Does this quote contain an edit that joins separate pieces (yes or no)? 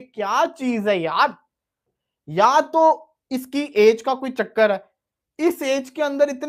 no